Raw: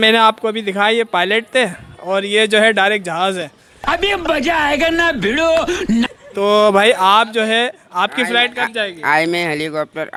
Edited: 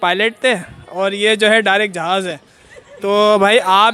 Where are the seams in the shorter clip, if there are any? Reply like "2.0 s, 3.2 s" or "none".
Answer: 2.8 s

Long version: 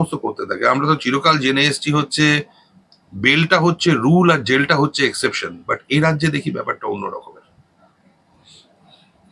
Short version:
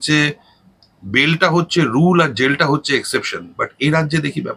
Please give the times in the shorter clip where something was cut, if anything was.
none

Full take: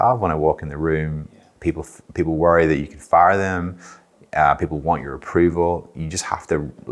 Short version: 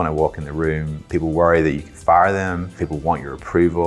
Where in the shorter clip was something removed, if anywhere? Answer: 1.0 s, 2.8 s

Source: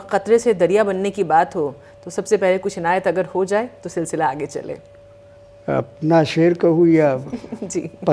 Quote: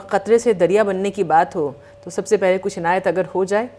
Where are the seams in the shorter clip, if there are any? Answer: none

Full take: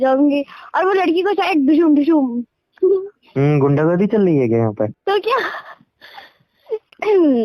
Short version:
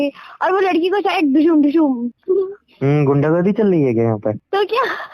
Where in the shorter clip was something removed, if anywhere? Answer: 2.1 s

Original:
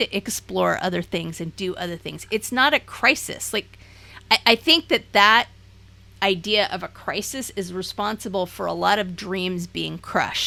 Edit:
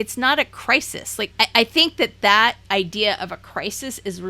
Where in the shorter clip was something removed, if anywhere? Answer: 1.3 s, 2.6 s

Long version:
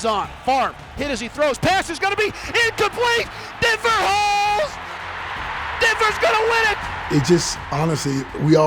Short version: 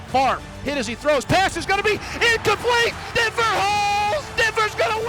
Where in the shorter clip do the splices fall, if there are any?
3.0 s, 4.3 s

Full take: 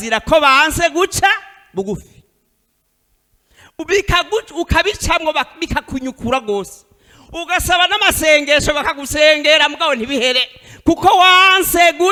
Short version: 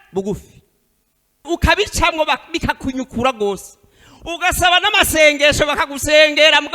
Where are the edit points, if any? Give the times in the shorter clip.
1.4 s

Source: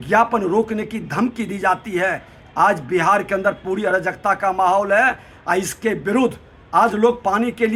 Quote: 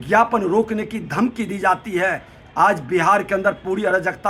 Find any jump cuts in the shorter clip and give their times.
none

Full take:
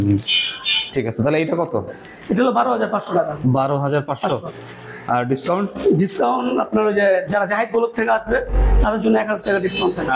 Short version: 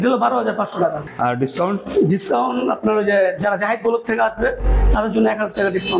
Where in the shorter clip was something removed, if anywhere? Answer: 1.0 s

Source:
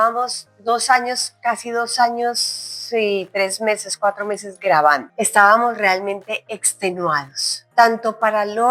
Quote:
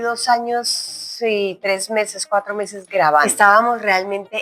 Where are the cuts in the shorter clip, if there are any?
3.3 s

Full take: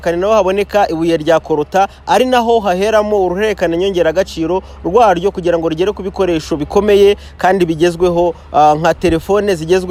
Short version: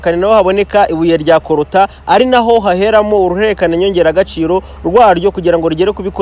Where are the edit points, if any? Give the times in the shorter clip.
none

